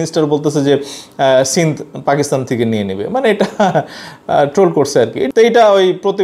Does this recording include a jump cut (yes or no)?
no